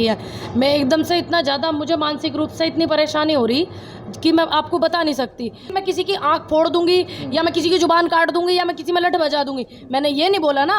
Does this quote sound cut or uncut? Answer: cut